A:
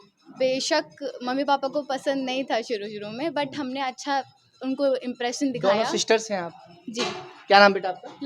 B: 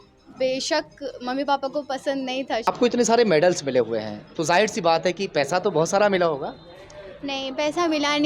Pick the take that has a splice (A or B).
B